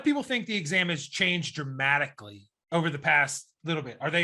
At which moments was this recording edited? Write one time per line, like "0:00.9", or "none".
none